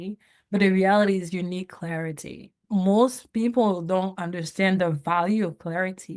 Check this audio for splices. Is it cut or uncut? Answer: cut